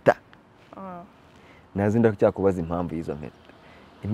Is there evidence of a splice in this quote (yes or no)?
no